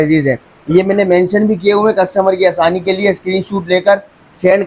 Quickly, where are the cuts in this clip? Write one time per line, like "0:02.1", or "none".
none